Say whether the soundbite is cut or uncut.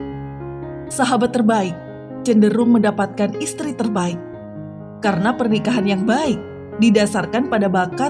cut